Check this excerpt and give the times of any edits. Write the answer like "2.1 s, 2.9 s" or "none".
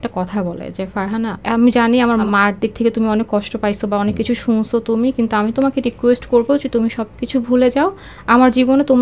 1.4 s, 2.3 s

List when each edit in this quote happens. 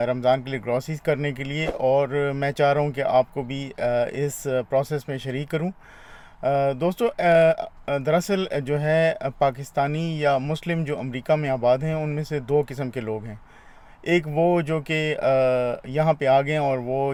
none

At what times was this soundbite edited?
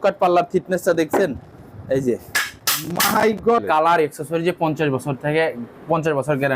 3.6 s

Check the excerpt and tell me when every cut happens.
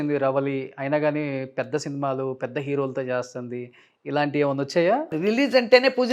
5.1 s

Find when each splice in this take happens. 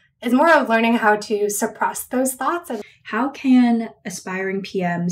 2.8 s

